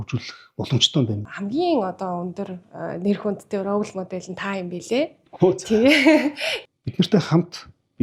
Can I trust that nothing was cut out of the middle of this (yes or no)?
no